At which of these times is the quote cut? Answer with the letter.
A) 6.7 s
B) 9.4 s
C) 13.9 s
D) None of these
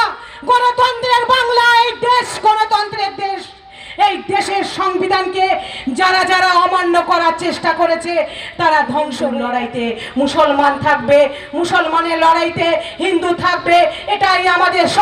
B